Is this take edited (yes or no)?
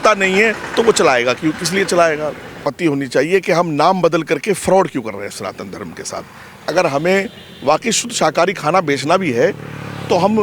yes